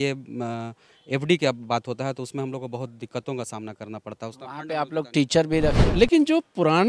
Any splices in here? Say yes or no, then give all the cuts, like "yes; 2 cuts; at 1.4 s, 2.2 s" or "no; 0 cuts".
yes; 1 cut; at 5.8 s